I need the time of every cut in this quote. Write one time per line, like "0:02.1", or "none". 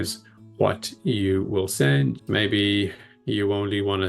0:02.2

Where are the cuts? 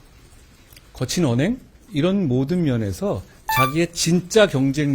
0:01.8

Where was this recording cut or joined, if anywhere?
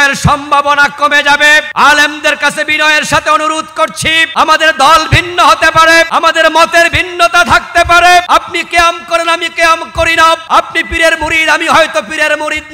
0:01.7
0:04.2
0:06.1
0:08.3
0:10.4

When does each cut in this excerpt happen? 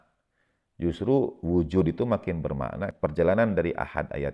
0:02.9

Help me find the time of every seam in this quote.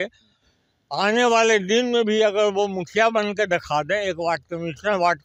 none

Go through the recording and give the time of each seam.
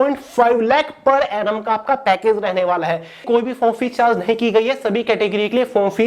0:03.2

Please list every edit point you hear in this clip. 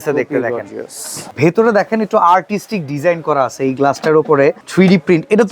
0:01.3
0:04.6

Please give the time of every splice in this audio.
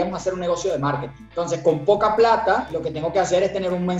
0:01.2
0:02.8

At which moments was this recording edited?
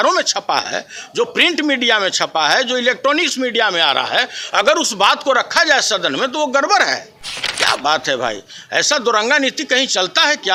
none

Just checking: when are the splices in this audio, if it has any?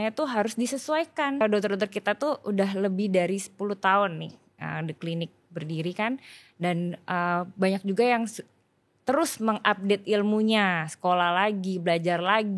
0:01.4

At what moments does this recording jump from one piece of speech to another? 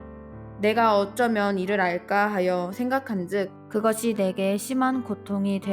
0:03.6

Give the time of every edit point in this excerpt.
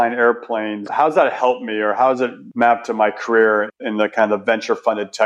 0:00.9

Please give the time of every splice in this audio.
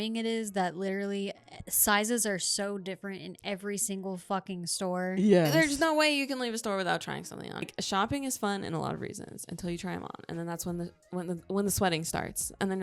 0:07.7

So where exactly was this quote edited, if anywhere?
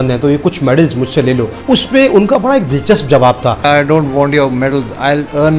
0:01.6
0:03.6

